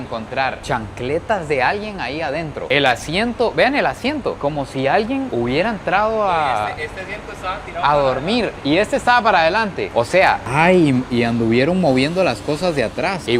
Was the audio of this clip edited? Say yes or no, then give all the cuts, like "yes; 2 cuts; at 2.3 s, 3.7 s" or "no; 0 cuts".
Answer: no; 0 cuts